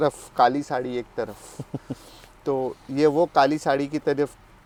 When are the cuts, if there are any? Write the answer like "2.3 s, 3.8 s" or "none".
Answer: none